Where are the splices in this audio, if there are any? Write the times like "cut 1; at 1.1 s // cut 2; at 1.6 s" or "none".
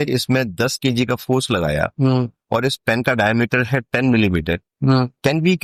none